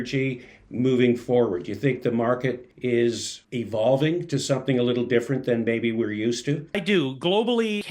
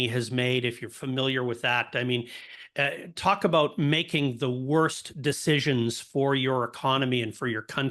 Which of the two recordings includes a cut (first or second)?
first